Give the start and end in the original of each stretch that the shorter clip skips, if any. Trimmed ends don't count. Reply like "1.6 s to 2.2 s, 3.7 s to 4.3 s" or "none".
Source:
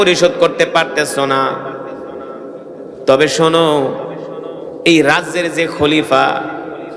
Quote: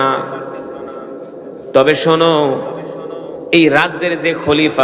none